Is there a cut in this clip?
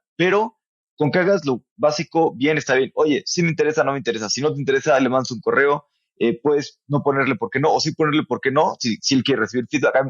no; 0 cuts

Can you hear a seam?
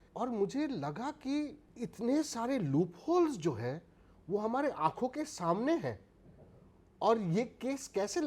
yes; 1 cut; at 1.6 s

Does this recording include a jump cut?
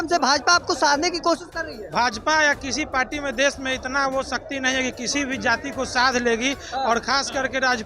no; 0 cuts

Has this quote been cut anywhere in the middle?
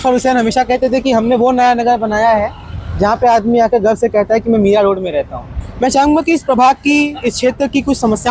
no; 0 cuts

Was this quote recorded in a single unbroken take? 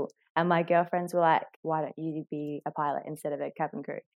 no; 1 cut; at 1.5 s

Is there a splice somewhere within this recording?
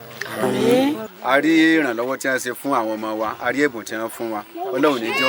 yes; 1 cut; at 1.1 s

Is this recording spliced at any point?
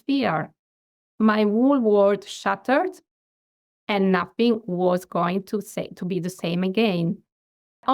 no; 0 cuts

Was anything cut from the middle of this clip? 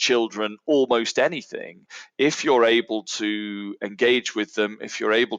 no; 0 cuts

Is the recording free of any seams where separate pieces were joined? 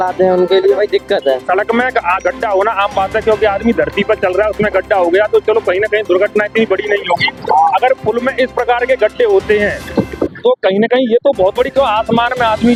yes; 0 cuts

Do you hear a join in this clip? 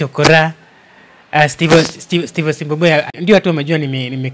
yes; 1 cut; at 3.1 s

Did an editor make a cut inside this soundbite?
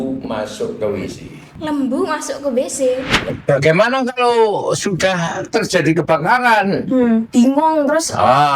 yes; 1 cut; at 3.4 s

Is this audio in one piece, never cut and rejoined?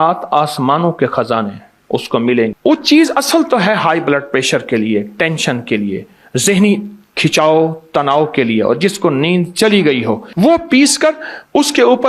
no; 2 cuts; at 2.6 s, 10.3 s

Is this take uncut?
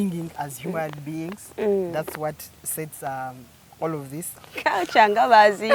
no; 1 cut; at 4.3 s

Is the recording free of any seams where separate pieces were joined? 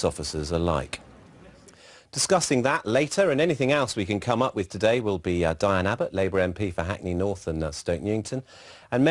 yes; 0 cuts

